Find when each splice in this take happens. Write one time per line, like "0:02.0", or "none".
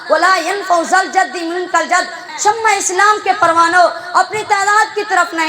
0:02.2

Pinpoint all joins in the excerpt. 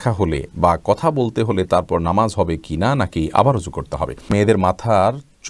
0:04.3

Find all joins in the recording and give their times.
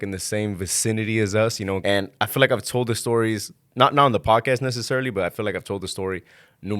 0:01.8

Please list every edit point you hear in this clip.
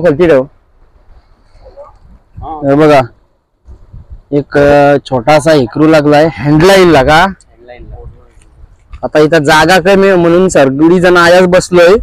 none

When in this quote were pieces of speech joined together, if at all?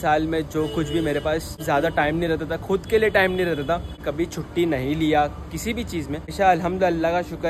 0:01.6
0:04.0
0:06.3

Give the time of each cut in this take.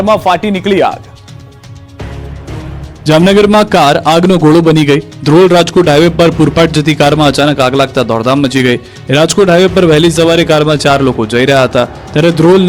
none

